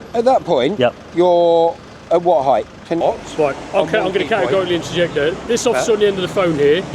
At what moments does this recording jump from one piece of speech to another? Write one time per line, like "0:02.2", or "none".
0:03.0